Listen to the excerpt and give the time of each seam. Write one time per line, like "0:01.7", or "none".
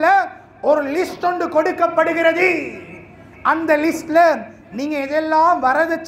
none